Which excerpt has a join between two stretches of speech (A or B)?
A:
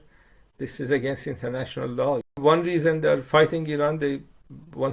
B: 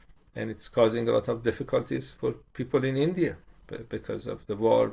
A